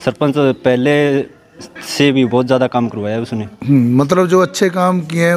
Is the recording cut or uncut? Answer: uncut